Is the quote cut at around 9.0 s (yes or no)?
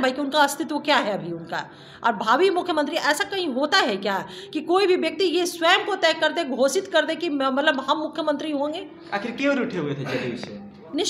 no